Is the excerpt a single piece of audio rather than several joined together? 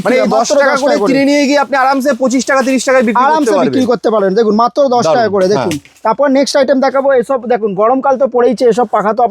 yes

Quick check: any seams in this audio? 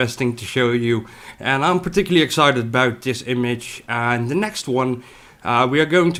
no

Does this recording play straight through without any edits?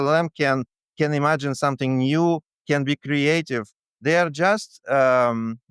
yes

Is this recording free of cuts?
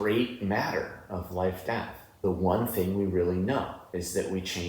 no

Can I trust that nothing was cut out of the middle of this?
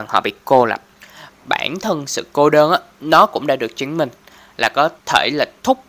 no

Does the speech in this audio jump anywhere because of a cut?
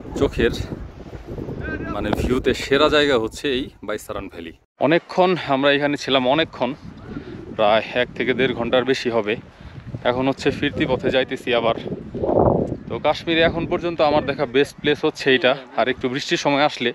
no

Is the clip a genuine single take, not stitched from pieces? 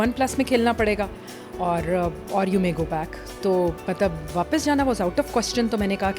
yes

